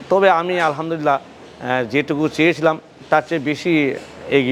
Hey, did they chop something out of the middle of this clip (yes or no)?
no